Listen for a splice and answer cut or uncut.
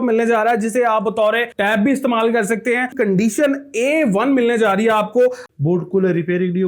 cut